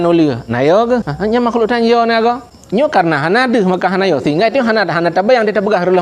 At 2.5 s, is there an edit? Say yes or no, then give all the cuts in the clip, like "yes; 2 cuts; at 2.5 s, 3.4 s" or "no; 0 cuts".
yes; 2 cuts; at 1.1 s, 2.5 s